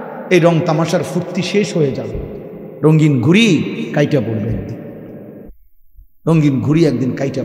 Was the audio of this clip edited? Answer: yes; 1 cut; at 5.5 s

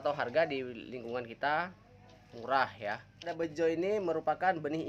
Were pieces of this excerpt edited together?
yes; 1 cut; at 3.3 s

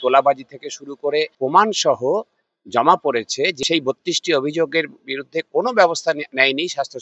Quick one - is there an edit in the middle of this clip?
yes; 2 cuts; at 1.3 s, 3.6 s

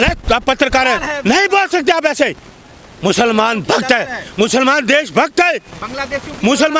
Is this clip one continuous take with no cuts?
yes; 0 cuts

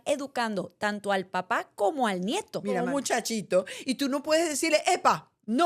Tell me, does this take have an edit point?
yes; 1 cut; at 2.8 s

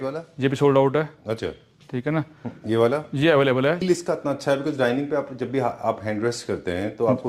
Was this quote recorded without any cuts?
no; 1 cut; at 3.8 s

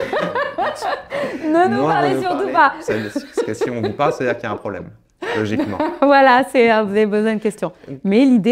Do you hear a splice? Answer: no; 0 cuts

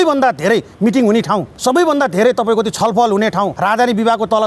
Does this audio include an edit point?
yes; 2 cuts; at 1.5 s, 3.5 s

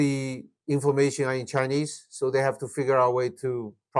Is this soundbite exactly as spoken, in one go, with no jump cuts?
yes; 0 cuts

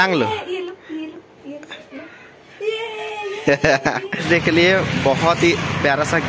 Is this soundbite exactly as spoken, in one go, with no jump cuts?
no; 1 cut; at 4.2 s

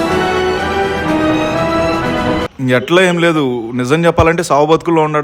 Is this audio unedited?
no; 1 cut; at 2.5 s

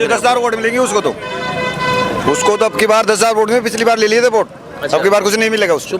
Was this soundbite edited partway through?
no; 0 cuts

